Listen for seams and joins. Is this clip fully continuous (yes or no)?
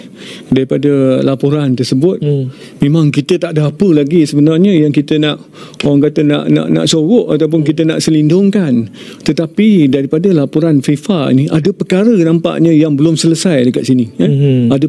yes